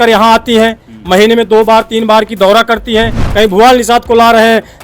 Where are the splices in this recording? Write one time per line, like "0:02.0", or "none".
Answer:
0:03.2